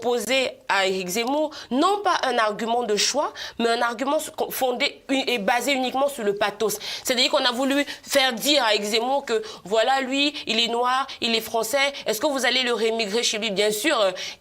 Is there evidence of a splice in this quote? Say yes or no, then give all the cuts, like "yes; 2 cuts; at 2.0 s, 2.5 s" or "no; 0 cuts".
no; 0 cuts